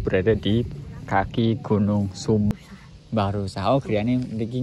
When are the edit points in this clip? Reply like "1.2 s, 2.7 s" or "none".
2.5 s